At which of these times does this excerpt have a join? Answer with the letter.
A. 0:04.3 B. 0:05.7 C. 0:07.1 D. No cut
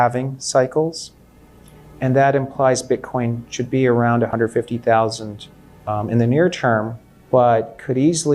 A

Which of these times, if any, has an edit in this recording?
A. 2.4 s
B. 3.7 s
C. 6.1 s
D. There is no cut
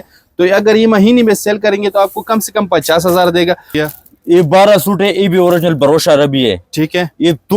B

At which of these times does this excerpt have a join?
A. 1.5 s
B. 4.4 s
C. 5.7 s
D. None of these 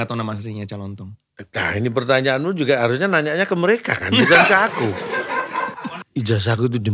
C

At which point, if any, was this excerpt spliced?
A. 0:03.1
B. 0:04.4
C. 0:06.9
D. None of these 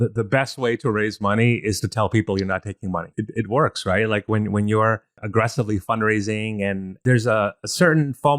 C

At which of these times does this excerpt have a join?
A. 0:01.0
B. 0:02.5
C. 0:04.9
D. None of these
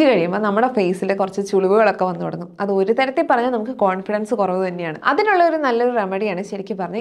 C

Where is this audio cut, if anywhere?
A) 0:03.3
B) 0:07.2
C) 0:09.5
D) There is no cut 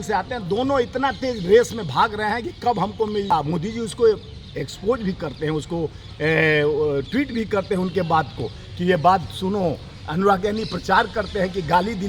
A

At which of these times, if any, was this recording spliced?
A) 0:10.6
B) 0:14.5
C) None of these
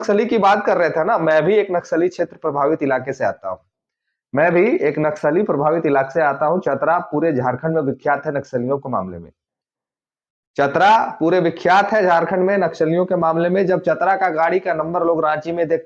C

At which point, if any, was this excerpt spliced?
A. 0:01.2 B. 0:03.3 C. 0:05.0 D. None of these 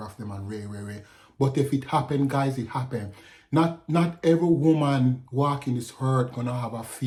D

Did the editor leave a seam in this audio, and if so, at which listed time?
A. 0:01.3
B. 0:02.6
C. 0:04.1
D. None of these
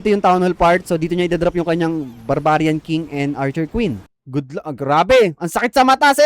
C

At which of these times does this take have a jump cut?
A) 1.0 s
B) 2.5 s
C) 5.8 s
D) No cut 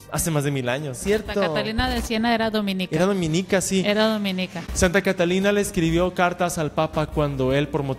A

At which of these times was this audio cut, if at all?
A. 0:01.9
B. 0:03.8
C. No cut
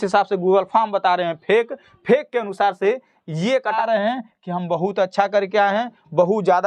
B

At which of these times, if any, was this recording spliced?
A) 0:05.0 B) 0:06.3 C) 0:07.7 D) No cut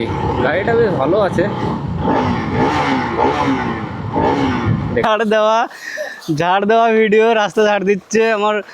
A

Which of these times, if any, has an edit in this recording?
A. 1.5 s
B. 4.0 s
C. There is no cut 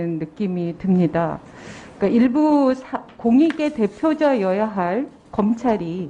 C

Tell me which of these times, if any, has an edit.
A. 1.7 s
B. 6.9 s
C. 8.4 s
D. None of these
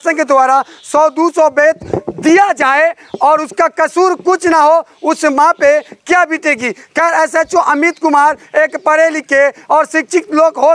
D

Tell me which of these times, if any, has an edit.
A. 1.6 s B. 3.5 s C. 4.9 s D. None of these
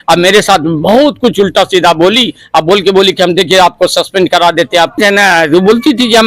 C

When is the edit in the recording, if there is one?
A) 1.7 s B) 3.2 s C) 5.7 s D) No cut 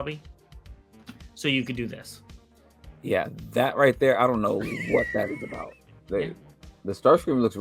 C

